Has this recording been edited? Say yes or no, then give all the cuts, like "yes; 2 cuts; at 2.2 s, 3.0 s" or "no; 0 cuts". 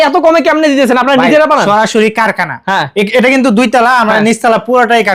no; 0 cuts